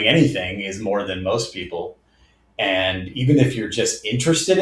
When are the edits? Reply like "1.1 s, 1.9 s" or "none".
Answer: none